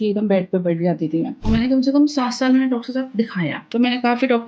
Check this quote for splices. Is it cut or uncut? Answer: cut